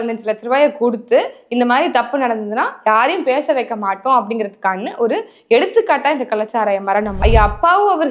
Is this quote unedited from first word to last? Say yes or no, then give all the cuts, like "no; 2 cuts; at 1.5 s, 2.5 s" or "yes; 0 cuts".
no; 1 cut; at 7.2 s